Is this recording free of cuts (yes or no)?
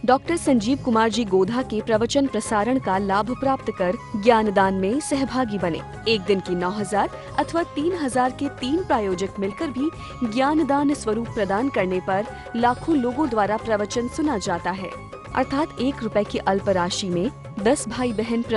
yes